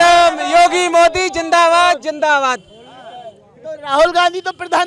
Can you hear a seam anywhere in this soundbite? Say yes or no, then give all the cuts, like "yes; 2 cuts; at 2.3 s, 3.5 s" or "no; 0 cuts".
no; 0 cuts